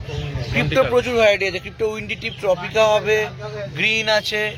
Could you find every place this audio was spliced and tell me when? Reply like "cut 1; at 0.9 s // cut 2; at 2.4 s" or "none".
none